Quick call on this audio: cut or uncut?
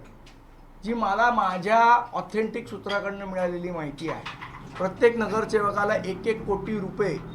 uncut